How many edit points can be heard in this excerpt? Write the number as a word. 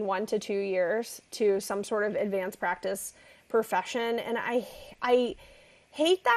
zero